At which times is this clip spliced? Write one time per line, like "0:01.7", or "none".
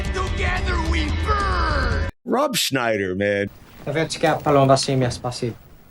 0:02.1